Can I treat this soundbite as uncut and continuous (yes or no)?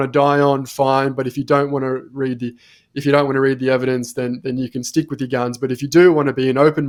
yes